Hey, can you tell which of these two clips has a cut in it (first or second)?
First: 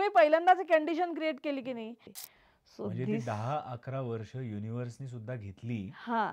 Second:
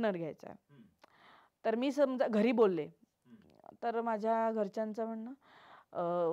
first